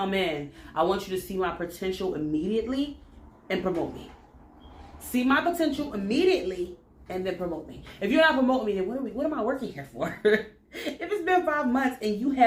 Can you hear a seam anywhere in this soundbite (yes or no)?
no